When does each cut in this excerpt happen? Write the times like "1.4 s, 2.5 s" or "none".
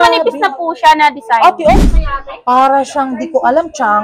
1.9 s